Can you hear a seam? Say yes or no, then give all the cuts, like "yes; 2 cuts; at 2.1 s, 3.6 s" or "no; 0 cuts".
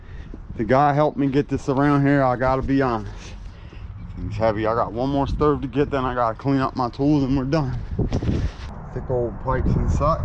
yes; 1 cut; at 8.6 s